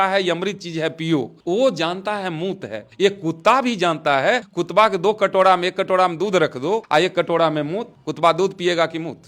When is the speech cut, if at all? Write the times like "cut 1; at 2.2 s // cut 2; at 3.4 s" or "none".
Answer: cut 1; at 4.5 s // cut 2; at 6.8 s